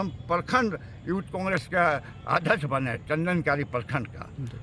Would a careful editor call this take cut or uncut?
uncut